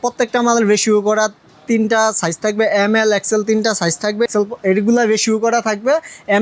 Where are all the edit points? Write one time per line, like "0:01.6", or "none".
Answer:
0:04.3

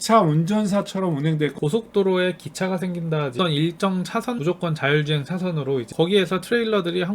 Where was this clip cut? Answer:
0:01.5
0:03.3
0:04.4
0:05.9

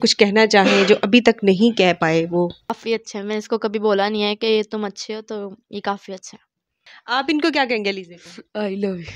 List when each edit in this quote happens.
0:02.8
0:06.9

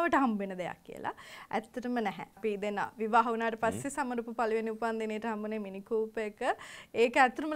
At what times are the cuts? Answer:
0:02.4

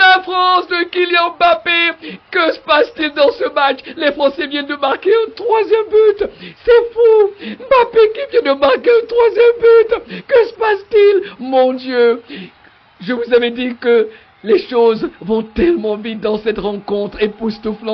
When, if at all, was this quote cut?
none

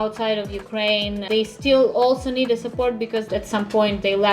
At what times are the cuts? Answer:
0:01.2
0:03.3

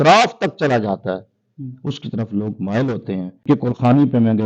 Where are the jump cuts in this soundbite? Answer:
0:03.4

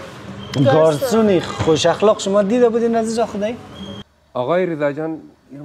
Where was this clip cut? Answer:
0:03.9

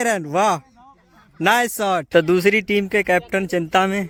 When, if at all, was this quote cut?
none

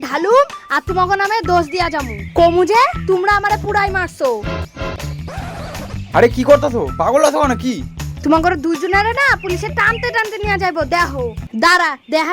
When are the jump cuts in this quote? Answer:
0:11.4

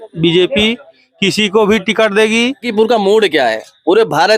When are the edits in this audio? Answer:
0:02.7

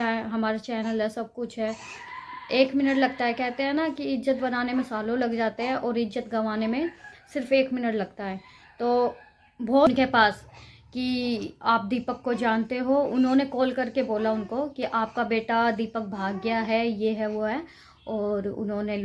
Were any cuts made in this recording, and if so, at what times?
0:09.9

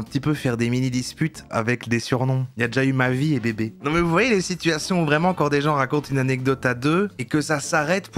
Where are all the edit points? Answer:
0:01.5
0:03.7

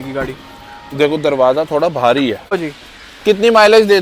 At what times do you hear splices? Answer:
0:02.6

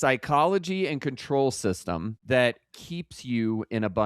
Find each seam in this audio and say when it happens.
0:02.2

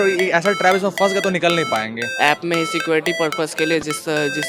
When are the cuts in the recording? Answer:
0:02.0

